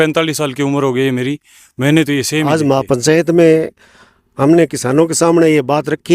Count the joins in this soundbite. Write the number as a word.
one